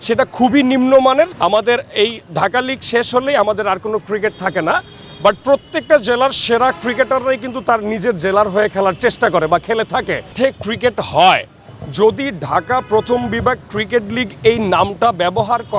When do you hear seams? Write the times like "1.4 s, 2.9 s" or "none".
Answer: 1.3 s, 10.3 s